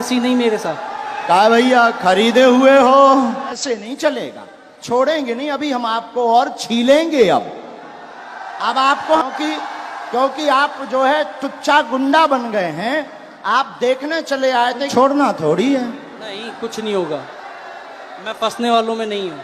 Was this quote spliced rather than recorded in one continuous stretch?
yes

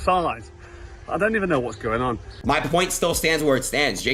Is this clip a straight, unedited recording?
no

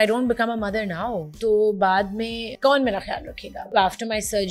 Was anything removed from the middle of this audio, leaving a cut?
yes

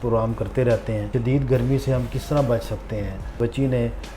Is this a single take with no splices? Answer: no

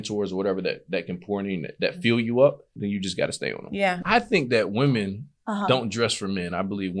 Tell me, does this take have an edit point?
yes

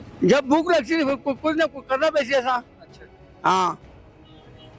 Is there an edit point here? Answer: no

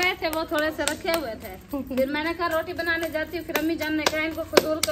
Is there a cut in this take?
no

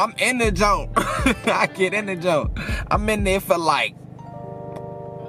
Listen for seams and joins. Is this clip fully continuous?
yes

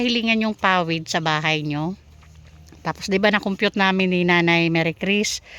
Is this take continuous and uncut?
yes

